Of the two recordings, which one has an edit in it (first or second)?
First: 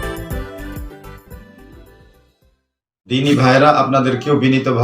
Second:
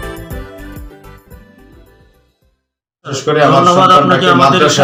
first